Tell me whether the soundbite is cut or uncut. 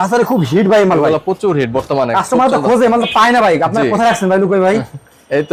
uncut